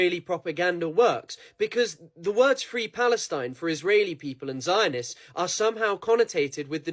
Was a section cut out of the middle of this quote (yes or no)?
no